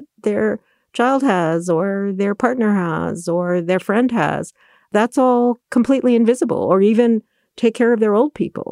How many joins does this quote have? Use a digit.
1